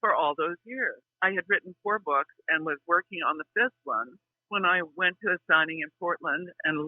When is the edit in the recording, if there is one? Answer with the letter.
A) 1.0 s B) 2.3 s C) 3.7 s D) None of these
A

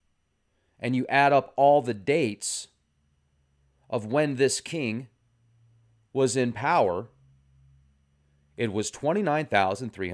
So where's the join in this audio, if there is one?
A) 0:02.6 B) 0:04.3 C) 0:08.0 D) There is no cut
B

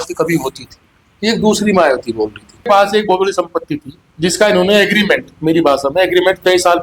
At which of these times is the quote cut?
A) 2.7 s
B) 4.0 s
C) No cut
A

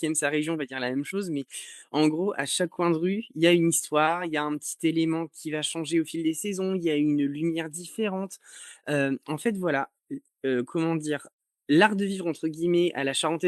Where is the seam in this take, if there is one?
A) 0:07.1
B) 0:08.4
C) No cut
C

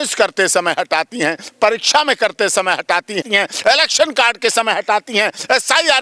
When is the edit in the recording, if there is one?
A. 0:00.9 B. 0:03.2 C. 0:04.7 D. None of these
B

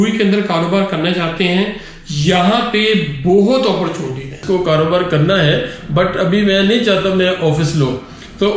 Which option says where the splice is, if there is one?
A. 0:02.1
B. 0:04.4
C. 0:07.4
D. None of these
B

